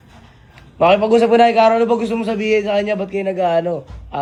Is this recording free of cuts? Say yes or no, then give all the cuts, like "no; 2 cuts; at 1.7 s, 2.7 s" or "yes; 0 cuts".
yes; 0 cuts